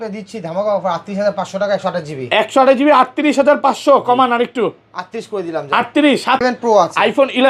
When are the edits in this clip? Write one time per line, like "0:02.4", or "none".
0:06.4